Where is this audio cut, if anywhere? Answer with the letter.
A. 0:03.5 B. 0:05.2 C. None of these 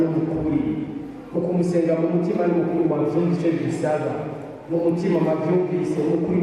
C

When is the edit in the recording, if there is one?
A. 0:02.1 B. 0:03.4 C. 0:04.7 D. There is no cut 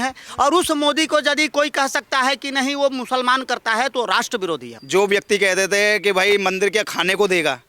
C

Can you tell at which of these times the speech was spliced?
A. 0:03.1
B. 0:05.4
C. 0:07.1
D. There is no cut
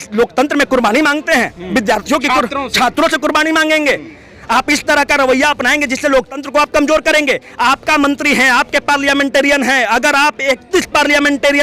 D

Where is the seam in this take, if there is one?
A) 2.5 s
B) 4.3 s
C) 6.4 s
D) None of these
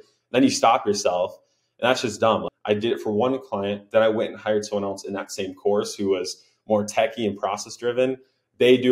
A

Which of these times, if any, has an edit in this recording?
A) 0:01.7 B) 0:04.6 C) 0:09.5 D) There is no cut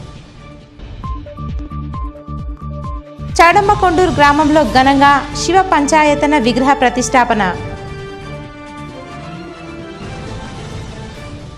A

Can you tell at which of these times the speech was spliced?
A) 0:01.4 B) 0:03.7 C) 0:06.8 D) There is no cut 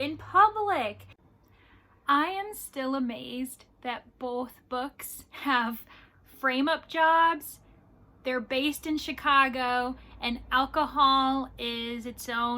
A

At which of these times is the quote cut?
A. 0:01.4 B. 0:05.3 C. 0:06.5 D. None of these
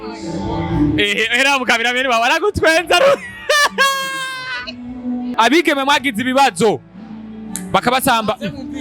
B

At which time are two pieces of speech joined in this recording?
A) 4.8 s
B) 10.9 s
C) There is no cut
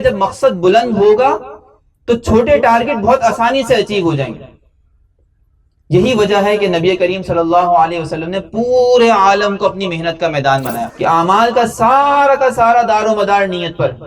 B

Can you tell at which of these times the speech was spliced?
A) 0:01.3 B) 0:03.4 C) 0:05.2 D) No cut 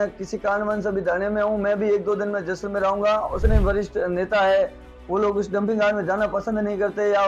B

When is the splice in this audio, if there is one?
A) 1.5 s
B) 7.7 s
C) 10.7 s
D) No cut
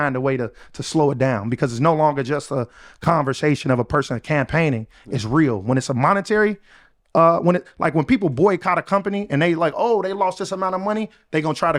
D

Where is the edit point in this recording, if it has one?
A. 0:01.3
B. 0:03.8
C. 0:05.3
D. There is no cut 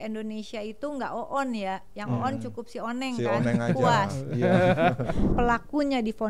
C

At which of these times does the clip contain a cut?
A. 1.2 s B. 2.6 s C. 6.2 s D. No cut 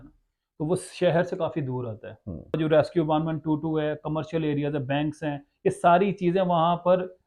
B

